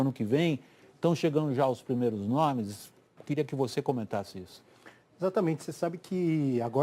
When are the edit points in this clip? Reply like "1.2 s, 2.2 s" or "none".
4.4 s